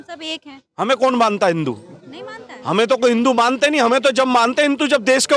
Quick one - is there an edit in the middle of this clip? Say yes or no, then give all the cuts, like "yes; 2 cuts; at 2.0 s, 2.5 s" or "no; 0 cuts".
no; 0 cuts